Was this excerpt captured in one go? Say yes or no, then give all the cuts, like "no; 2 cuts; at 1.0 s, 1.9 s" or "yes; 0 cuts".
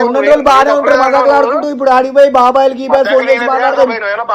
yes; 0 cuts